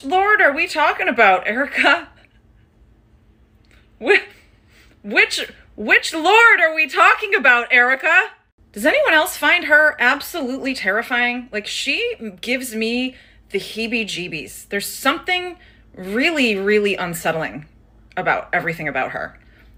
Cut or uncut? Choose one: uncut